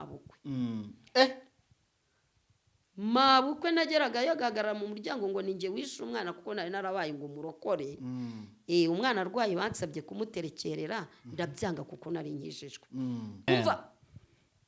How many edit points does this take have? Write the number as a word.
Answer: one